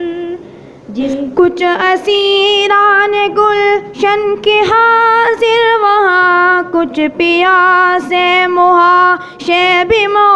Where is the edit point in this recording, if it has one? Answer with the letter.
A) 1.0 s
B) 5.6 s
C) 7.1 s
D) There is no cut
A